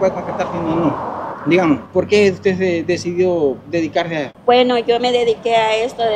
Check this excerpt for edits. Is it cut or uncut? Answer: cut